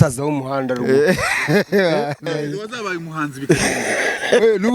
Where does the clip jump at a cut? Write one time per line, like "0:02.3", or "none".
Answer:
0:02.2